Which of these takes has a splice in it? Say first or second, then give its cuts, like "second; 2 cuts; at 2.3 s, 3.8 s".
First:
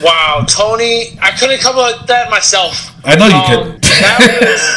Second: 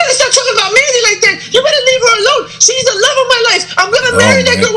first; 2 cuts; at 1.2 s, 3.8 s